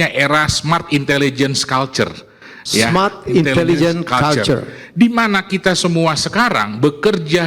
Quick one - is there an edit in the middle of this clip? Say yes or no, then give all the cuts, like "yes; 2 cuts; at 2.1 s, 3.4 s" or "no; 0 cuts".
no; 0 cuts